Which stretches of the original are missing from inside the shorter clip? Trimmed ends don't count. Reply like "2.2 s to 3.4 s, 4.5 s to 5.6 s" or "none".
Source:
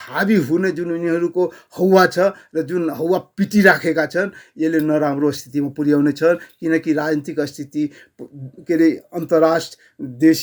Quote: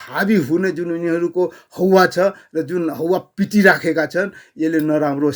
none